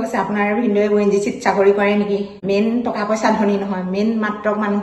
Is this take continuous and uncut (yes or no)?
no